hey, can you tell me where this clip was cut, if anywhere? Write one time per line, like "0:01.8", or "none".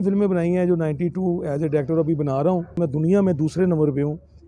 0:02.7